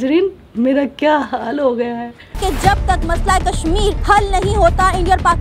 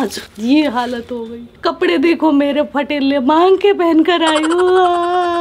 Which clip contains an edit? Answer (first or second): first